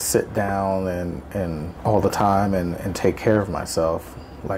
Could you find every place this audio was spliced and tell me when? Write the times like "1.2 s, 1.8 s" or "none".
1.7 s

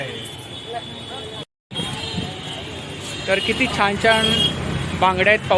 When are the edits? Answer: 1.4 s

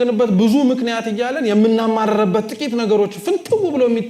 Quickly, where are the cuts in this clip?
none

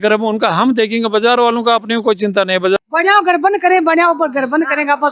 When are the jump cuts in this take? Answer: 2.8 s

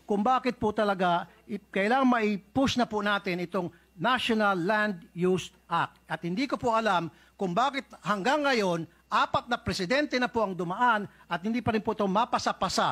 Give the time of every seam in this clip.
none

